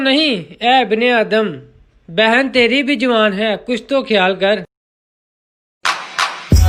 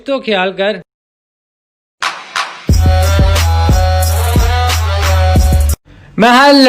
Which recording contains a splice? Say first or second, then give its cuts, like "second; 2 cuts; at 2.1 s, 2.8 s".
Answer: second; 1 cut; at 5.8 s